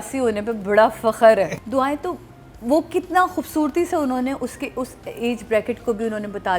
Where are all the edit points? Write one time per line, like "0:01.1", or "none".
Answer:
0:01.5